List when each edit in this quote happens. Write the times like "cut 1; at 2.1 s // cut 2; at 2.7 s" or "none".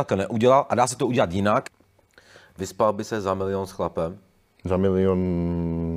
cut 1; at 1.7 s